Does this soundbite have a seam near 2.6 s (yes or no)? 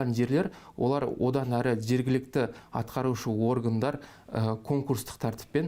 no